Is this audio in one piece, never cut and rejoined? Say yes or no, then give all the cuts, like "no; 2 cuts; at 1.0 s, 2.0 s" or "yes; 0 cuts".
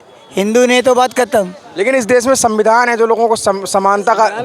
no; 1 cut; at 1.6 s